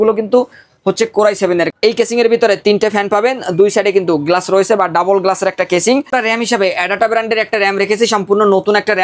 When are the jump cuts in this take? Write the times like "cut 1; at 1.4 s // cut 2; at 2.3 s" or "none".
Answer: cut 1; at 1.7 s // cut 2; at 6.1 s